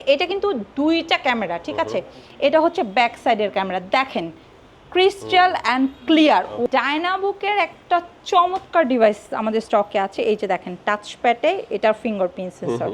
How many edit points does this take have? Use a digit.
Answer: 1